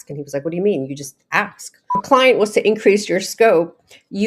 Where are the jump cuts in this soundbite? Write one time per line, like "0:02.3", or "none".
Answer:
0:02.0